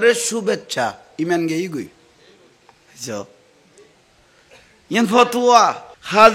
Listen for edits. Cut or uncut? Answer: uncut